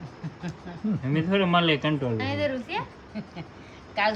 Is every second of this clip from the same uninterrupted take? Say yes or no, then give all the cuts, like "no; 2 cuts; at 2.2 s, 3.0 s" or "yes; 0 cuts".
yes; 0 cuts